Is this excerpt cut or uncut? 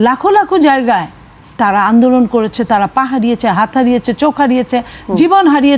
uncut